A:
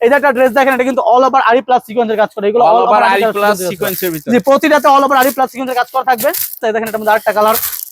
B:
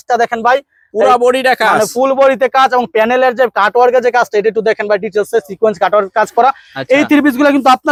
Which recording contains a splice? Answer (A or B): A